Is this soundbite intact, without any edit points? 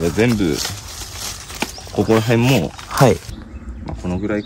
no; 1 cut; at 3.4 s

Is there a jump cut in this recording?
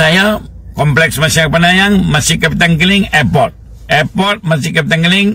no; 0 cuts

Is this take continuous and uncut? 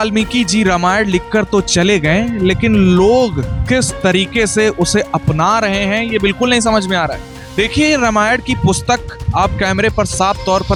yes; 0 cuts

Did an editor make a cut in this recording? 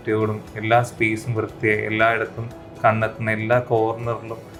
no; 0 cuts

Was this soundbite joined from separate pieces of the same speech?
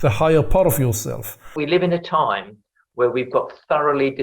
yes; 1 cut; at 1.6 s

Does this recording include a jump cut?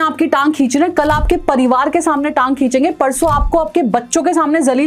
no; 0 cuts

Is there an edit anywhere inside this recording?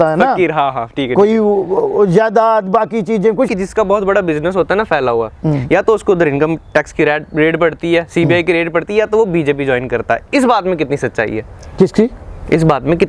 yes; 1 cut; at 3.5 s

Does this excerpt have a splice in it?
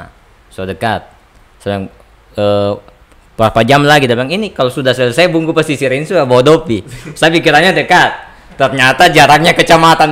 no; 0 cuts

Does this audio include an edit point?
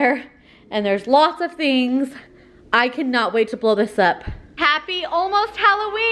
yes; 1 cut; at 4.5 s

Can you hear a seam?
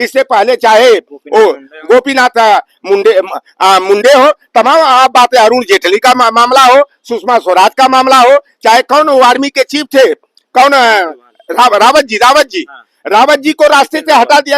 no; 0 cuts

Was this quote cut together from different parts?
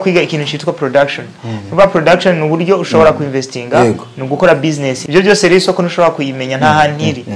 yes; 1 cut; at 5.0 s

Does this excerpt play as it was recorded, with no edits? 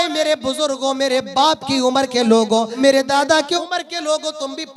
no; 2 cuts; at 2.7 s, 3.6 s

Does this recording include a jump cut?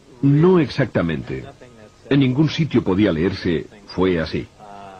no; 0 cuts

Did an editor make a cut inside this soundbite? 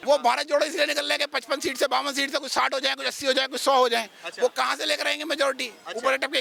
no; 0 cuts

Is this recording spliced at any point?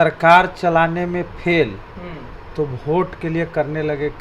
no; 0 cuts

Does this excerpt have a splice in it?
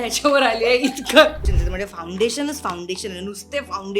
yes; 1 cut; at 1.4 s

